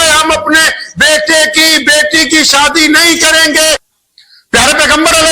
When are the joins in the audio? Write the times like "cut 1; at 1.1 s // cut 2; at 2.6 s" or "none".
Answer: cut 1; at 3.9 s